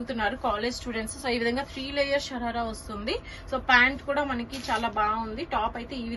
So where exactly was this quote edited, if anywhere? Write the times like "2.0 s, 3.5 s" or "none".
none